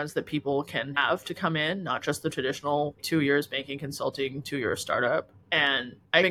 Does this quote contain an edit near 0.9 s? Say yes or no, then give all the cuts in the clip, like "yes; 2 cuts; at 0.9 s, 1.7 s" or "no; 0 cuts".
yes; 1 cut; at 0.9 s